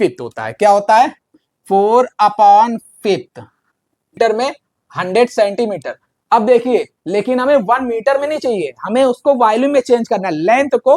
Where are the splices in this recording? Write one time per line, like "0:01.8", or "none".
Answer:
0:04.2